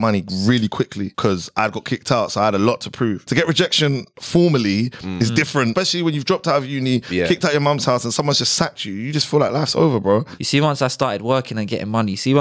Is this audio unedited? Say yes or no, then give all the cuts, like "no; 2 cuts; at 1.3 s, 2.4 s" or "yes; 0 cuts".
no; 4 cuts; at 1.1 s, 3.2 s, 5.7 s, 10.4 s